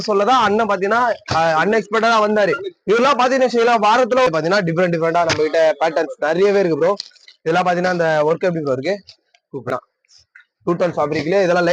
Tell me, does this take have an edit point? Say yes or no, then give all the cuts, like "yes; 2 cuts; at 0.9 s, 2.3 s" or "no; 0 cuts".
yes; 2 cuts; at 4.3 s, 9.7 s